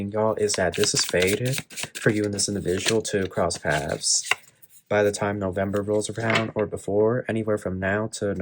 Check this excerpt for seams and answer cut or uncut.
uncut